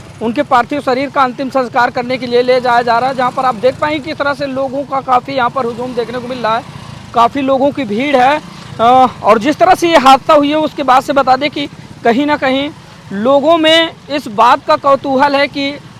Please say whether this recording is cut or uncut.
uncut